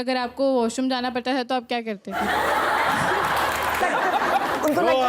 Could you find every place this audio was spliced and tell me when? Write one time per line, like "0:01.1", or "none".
0:03.8